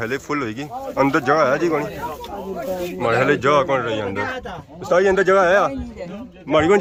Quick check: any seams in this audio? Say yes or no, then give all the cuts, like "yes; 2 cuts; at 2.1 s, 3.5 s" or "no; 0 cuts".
no; 0 cuts